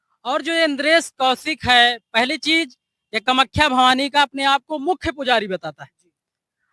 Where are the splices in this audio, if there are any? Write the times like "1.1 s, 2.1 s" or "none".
none